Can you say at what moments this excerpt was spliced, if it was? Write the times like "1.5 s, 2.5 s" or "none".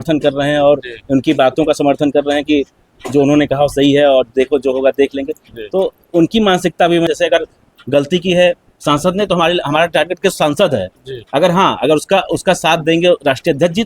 7.1 s